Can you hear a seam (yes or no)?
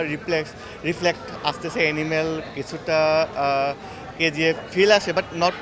no